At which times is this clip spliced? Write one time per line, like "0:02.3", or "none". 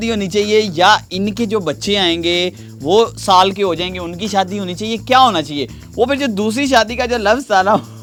none